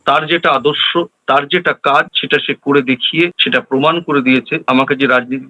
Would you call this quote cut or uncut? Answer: cut